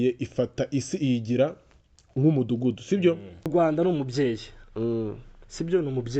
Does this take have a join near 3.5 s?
yes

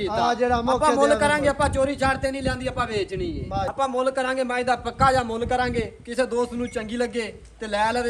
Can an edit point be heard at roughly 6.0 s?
no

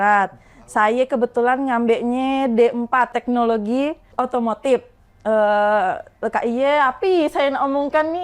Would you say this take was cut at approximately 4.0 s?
yes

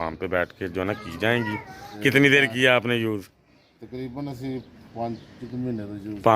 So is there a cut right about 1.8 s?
yes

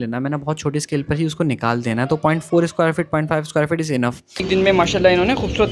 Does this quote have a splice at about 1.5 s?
no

